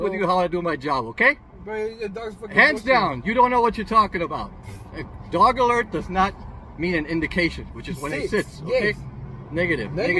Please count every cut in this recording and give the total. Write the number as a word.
zero